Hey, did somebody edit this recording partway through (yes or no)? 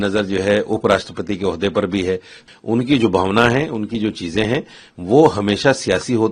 yes